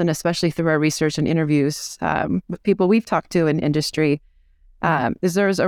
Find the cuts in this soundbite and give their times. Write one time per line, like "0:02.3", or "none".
none